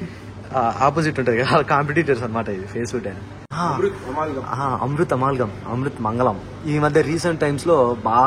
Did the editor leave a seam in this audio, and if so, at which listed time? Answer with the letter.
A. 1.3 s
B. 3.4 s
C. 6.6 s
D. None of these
B